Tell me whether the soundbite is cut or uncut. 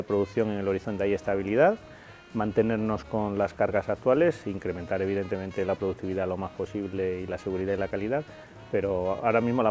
uncut